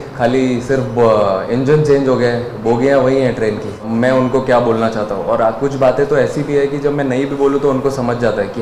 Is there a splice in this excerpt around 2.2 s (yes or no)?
no